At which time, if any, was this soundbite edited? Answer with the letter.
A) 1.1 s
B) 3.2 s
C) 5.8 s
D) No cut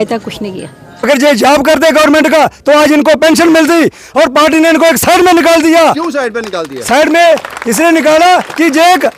A